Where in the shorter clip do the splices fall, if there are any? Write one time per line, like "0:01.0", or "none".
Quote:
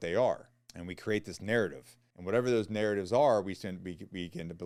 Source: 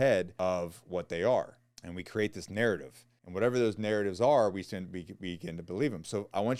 none